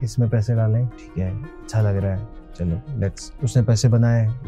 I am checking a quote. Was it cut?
yes; 1 cut; at 1.0 s

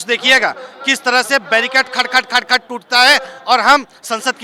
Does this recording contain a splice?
no; 0 cuts

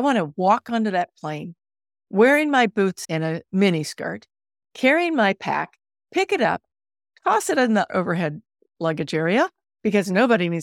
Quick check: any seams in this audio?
yes; 2 cuts; at 3.0 s, 7.9 s

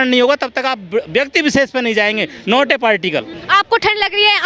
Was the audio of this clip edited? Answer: no; 0 cuts

